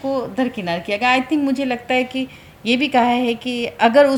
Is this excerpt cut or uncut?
uncut